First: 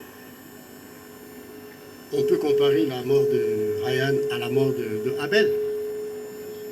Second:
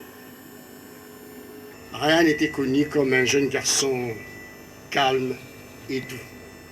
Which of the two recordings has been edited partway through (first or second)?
second